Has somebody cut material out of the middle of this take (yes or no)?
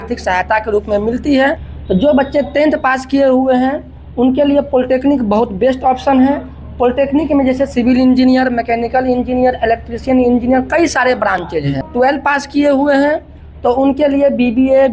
yes